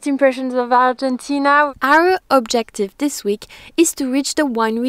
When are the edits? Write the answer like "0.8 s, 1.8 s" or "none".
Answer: 1.7 s